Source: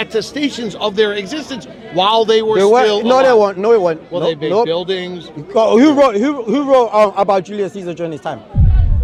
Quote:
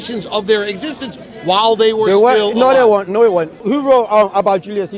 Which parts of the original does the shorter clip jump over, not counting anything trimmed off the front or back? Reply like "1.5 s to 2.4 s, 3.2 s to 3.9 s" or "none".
4.1 s to 6.4 s

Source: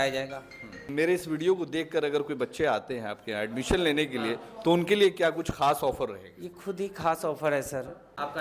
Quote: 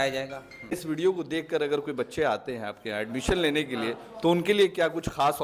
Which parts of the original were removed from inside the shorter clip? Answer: 1.0 s to 1.4 s

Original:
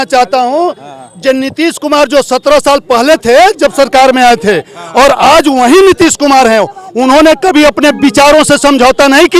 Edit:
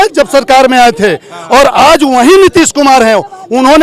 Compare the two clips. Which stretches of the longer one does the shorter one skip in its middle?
none

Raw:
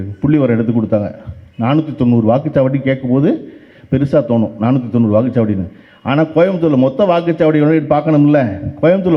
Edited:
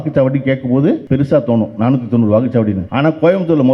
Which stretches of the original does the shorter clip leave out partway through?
3.4 s to 3.8 s, 5.7 s to 6.0 s

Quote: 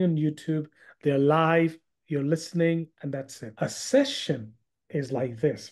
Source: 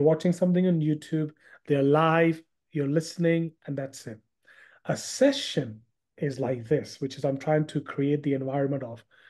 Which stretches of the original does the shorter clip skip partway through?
4.0 s to 4.7 s

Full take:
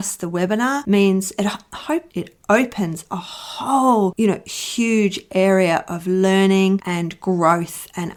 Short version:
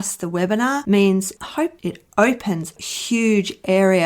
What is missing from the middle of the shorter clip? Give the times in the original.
1.3 s to 1.6 s, 3.2 s to 4.5 s

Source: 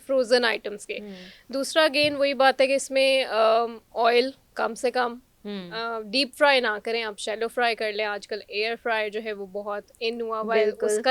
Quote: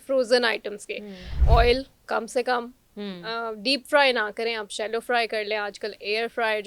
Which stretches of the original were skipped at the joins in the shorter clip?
1.3 s to 3.8 s

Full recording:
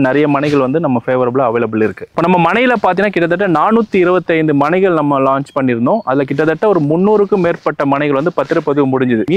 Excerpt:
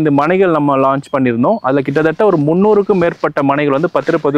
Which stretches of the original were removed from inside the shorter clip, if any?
none

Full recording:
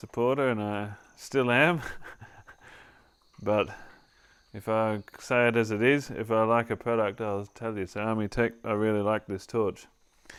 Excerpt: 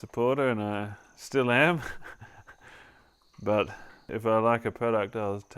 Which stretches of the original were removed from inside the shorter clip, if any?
4.1 s to 6.1 s

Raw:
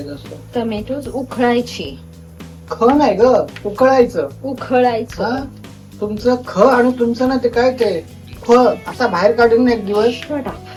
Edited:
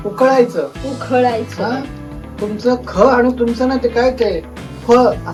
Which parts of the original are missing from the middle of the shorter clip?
none

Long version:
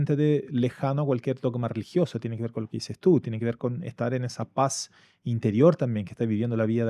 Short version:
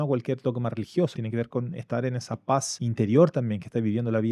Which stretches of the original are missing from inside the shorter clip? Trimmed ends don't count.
2.2 s to 3.3 s, 4.8 s to 5.2 s

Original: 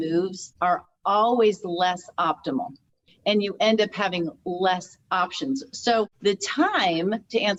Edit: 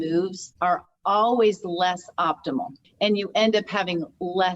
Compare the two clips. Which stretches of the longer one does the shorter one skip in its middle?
2.8 s to 3.1 s

